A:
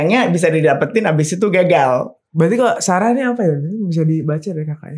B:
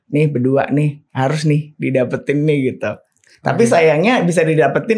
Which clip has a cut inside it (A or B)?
A